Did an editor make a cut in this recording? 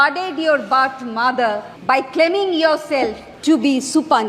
yes; 2 cuts; at 1.7 s, 3.3 s

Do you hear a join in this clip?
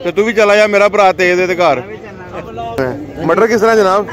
yes; 1 cut; at 2.8 s

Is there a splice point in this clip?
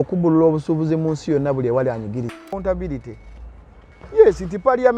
yes; 1 cut; at 2.5 s

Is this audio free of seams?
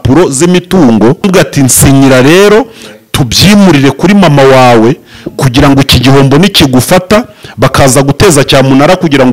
no; 1 cut; at 1.3 s

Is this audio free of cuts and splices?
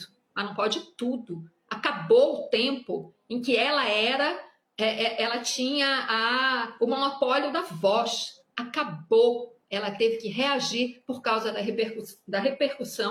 yes; 0 cuts

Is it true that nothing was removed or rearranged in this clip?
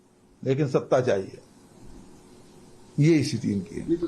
yes; 0 cuts

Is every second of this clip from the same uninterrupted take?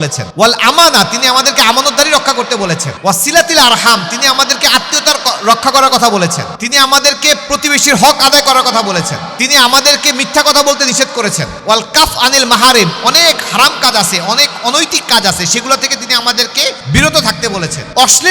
yes; 0 cuts

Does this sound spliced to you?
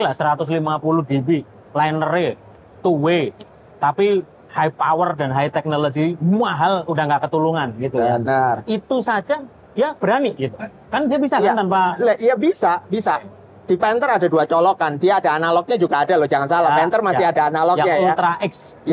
no; 0 cuts

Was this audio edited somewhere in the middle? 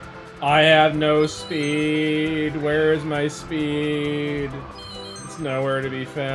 no; 0 cuts

